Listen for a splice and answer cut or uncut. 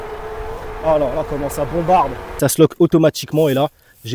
cut